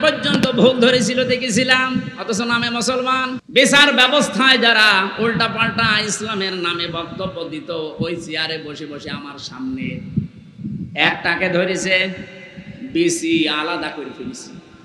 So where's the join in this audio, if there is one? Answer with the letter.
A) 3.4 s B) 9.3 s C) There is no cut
A